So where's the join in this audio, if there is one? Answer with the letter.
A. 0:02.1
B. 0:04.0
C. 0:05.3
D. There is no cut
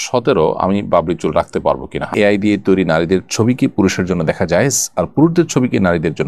A